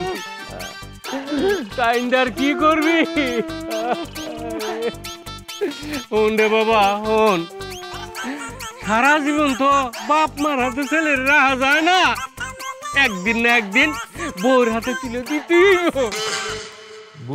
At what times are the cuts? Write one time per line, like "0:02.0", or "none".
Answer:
none